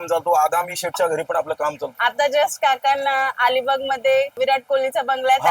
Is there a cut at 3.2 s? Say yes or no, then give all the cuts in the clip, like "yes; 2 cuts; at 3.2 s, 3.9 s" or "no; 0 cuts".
no; 1 cut; at 1.9 s